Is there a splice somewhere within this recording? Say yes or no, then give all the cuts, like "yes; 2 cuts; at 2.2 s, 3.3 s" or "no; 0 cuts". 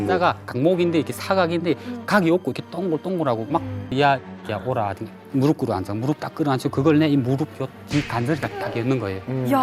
yes; 1 cut; at 3.9 s